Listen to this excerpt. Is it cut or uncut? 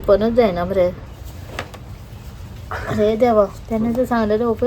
cut